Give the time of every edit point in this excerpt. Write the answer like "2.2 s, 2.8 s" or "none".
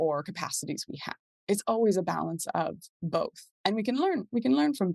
3.4 s